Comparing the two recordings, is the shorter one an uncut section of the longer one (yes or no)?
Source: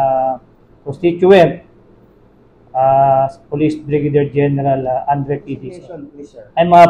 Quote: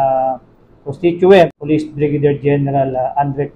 no